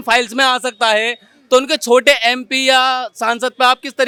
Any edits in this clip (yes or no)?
no